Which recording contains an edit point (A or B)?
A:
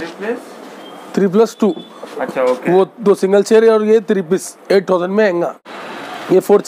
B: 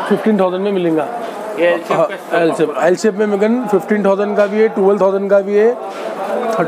A